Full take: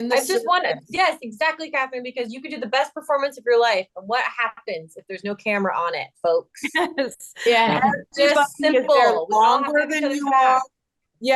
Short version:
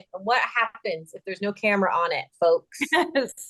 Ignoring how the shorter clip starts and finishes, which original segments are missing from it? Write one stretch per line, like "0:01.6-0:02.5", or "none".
none